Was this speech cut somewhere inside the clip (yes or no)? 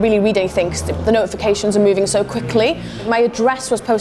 yes